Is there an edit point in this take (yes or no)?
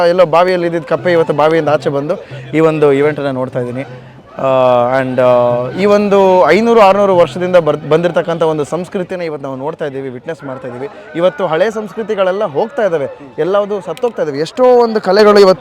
no